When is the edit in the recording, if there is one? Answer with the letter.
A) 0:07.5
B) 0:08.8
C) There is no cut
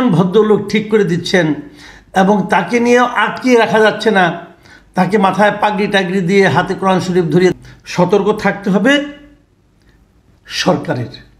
A